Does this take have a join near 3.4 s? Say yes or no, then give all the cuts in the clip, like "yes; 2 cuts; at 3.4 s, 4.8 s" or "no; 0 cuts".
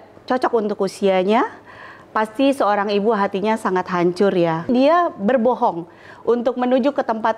no; 1 cut; at 4.7 s